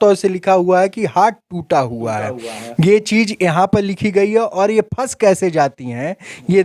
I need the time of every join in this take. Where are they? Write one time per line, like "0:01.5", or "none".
none